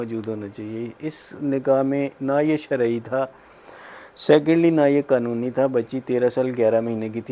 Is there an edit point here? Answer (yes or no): no